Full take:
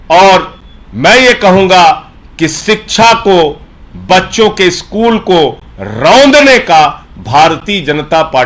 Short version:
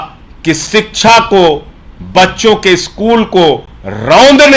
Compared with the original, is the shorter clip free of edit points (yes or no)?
yes